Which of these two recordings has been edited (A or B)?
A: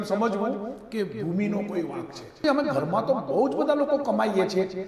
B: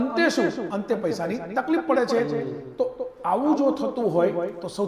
A